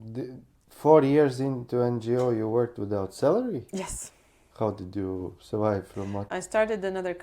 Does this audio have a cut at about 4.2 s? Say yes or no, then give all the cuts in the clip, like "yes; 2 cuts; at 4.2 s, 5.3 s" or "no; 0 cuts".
no; 1 cut; at 6.3 s